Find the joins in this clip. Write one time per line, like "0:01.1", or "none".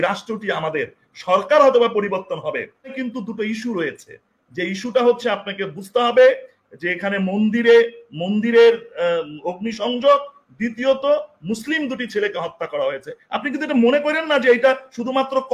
0:03.0